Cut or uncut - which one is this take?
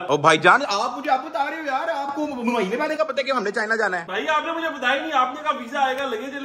uncut